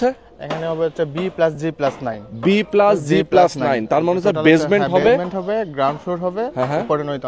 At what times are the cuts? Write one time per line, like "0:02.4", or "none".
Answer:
none